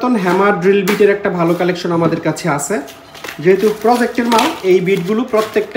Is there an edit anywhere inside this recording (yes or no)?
no